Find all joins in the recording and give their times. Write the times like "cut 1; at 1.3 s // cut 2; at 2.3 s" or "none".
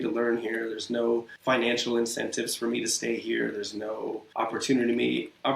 cut 1; at 1.3 s // cut 2; at 4.2 s